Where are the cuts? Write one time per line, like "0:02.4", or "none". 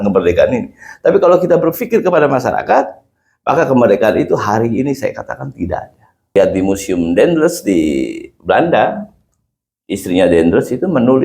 0:06.4